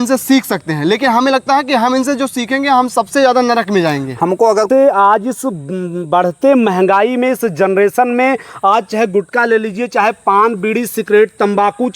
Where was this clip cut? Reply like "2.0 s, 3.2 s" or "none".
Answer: 4.7 s